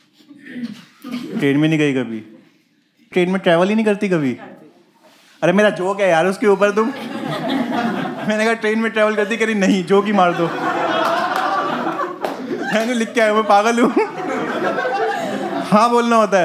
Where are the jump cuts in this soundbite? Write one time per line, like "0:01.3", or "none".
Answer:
0:03.1